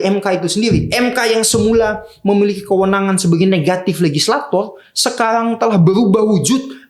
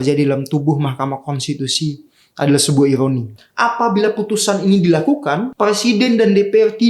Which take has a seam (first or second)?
second